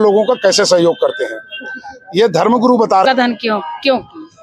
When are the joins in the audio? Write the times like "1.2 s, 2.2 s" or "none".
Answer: 3.0 s

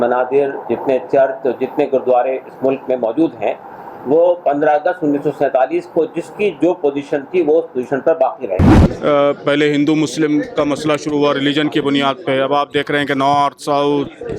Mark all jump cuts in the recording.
8.7 s

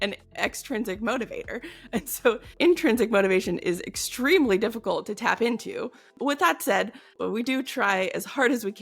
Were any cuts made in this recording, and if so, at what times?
6.0 s, 7.1 s

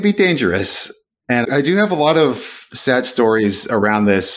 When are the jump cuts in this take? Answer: 1.0 s

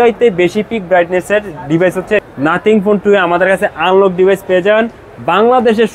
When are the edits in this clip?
2.2 s

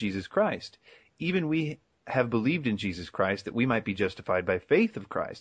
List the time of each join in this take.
none

